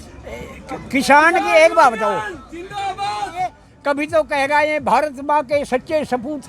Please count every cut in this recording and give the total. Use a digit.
1